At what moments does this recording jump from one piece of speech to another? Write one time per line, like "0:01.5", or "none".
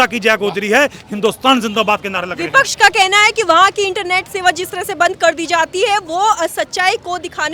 none